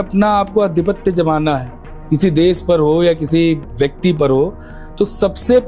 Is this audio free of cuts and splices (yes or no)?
yes